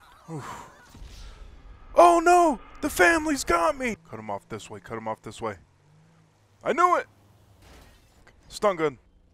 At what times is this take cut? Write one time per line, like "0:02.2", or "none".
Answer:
0:04.0
0:08.4